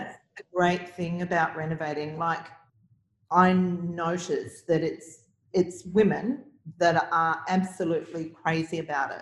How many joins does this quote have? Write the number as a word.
one